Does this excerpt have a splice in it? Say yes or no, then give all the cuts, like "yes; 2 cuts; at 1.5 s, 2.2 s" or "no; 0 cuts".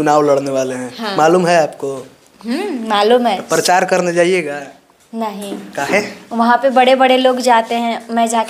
no; 0 cuts